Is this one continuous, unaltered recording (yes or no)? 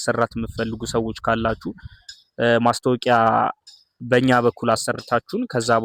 yes